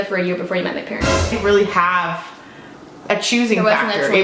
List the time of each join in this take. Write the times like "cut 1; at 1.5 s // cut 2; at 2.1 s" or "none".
cut 1; at 1.3 s